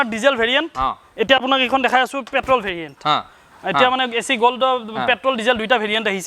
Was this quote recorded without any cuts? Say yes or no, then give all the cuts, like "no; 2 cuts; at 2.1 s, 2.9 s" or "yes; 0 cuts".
yes; 0 cuts